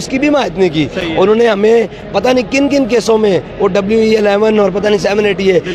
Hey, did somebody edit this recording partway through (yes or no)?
no